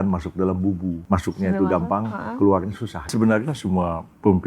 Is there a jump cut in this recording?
yes; 2 cuts; at 1.0 s, 3.1 s

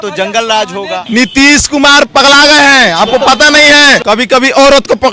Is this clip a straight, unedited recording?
no; 2 cuts; at 1.0 s, 4.0 s

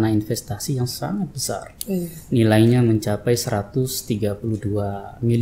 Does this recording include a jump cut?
no; 0 cuts

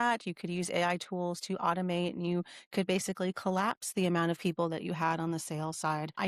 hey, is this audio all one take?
yes; 0 cuts

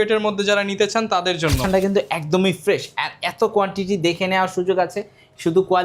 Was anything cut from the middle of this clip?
yes; 1 cut; at 1.6 s

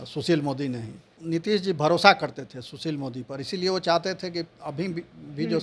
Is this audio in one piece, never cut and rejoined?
no; 1 cut; at 1.2 s

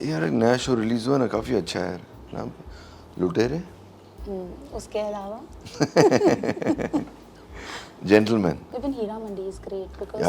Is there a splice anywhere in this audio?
yes; 1 cut; at 8.7 s

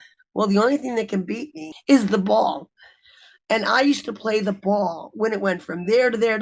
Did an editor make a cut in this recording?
yes; 1 cut; at 1.7 s

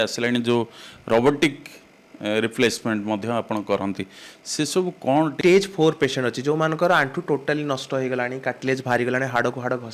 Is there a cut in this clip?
yes; 1 cut; at 5.4 s

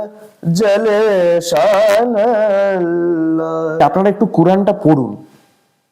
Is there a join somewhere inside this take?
yes; 1 cut; at 3.8 s

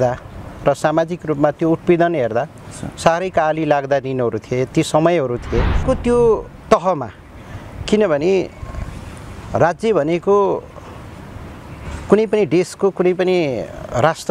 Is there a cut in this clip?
yes; 1 cut; at 5.7 s

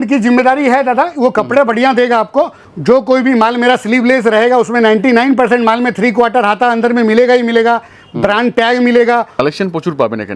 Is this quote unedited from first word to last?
no; 2 cuts; at 2.6 s, 9.3 s

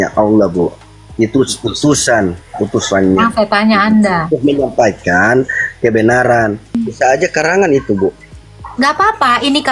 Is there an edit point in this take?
yes; 1 cut; at 6.8 s

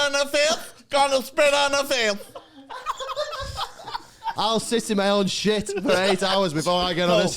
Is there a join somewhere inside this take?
yes; 1 cut; at 4.3 s

